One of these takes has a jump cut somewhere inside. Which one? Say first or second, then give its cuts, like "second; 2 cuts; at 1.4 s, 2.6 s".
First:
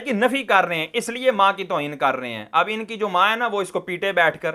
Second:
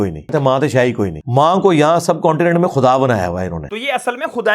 second; 2 cuts; at 1.2 s, 3.6 s